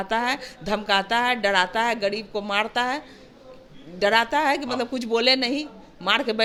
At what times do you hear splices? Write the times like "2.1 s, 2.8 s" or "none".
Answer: none